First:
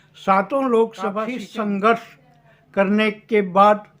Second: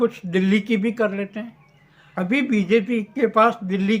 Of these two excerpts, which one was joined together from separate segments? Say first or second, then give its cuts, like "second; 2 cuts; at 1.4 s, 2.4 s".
first; 1 cut; at 1.3 s